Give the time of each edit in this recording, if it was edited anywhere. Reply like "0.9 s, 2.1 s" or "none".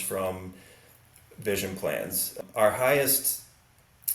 2.3 s